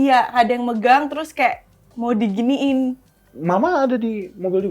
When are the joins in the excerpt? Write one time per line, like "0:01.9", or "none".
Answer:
none